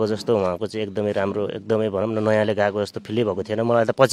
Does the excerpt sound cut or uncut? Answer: uncut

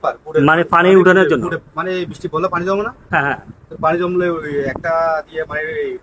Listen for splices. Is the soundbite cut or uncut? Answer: uncut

